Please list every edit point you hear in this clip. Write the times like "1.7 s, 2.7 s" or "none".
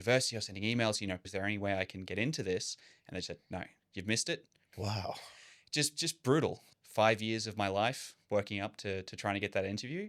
1.3 s, 4.6 s, 6.6 s